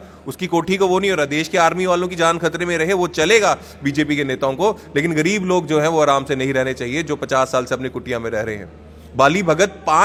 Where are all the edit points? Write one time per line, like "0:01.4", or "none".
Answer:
none